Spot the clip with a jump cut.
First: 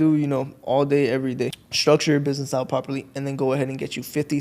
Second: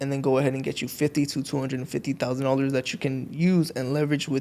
first; 1 cut; at 1.6 s

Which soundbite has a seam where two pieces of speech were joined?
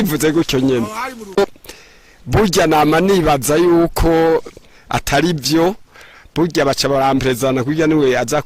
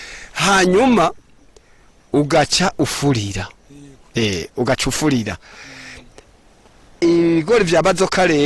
first; 1 cut; at 1.6 s

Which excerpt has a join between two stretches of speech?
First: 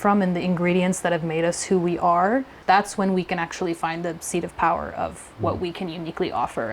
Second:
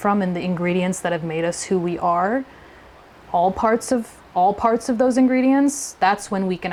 first; 1 cut; at 2.5 s

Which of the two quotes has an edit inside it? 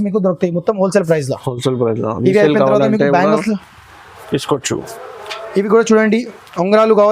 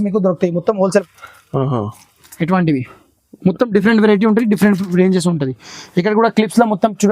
second; 1 cut; at 1.0 s

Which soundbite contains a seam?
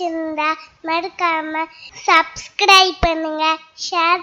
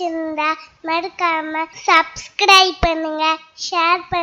second; 1 cut; at 1.7 s

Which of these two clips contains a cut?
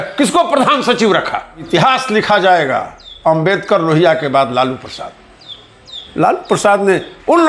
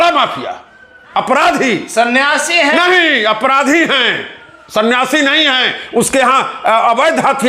first; 1 cut; at 1.6 s

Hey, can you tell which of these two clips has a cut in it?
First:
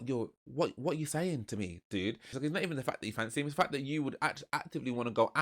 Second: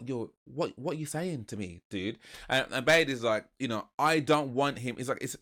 first; 1 cut; at 2.3 s

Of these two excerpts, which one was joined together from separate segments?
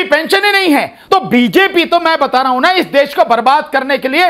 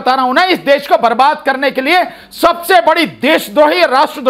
first; 1 cut; at 1.0 s

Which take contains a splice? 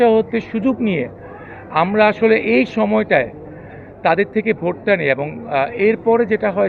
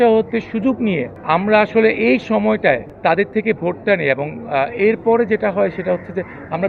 second; 2 cuts; at 1.1 s, 2.9 s

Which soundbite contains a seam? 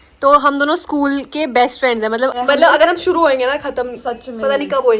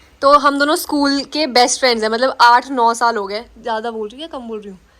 first; 1 cut; at 2.3 s

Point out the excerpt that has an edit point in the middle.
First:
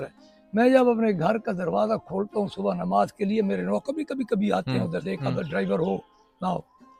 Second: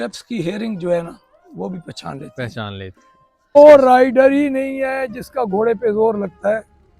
second; 1 cut; at 3.6 s

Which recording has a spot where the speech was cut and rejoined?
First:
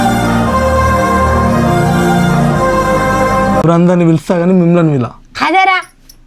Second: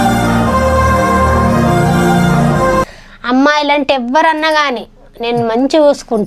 first; 1 cut; at 3.1 s

